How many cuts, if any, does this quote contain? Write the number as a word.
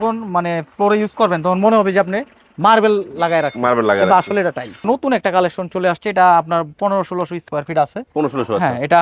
one